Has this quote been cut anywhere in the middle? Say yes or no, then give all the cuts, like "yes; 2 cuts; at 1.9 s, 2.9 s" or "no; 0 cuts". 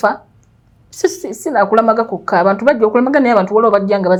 no; 0 cuts